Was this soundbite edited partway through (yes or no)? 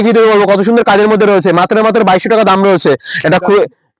no